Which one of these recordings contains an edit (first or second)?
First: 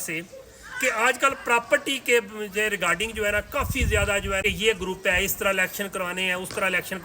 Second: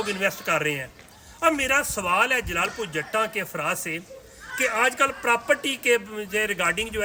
first